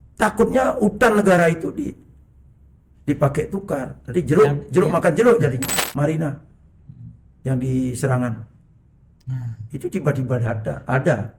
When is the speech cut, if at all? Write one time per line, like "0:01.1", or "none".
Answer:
0:05.7